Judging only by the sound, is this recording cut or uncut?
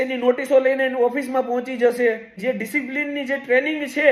cut